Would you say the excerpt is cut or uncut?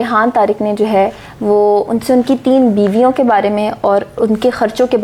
uncut